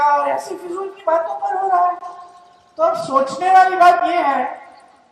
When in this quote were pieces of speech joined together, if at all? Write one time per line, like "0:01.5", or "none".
none

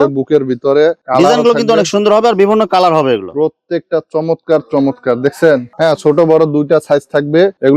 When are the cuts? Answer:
none

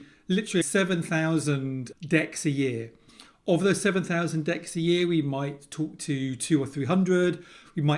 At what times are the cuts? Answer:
none

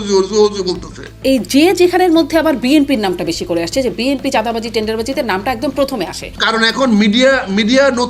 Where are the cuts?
0:01.2
0:06.3

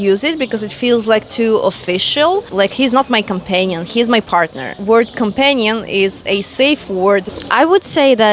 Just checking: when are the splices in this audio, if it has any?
none

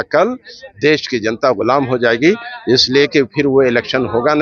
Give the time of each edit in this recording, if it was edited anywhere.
none

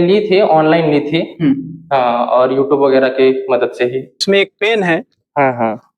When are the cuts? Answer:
0:04.2

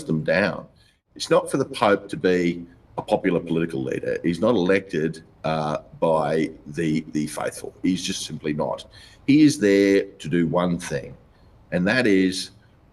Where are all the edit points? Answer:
0:00.9

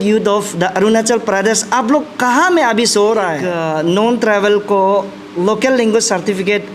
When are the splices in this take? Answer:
0:03.5

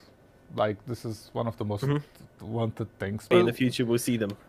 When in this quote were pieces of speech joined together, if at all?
0:03.3

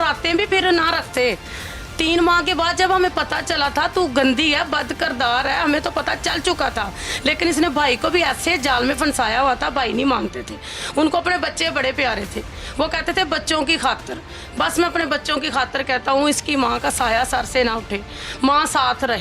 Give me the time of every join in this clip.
none

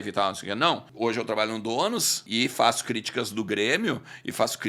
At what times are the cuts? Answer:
0:00.9
0:02.2

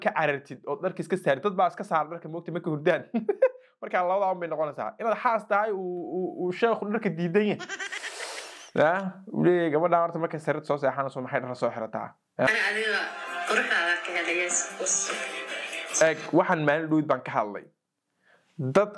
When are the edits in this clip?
0:12.5

